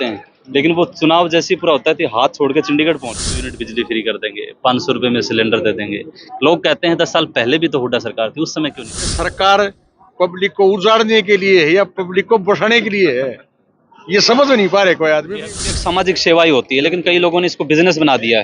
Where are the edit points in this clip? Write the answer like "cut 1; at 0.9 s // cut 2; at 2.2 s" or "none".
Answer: cut 1; at 3.5 s // cut 2; at 9.2 s // cut 3; at 15.7 s